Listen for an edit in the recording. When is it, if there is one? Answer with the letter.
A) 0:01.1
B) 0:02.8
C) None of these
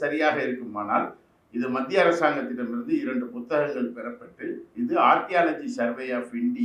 C